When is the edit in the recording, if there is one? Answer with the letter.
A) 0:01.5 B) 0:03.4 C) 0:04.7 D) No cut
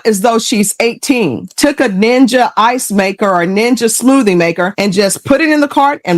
A